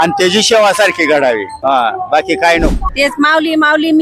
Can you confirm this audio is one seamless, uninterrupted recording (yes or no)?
no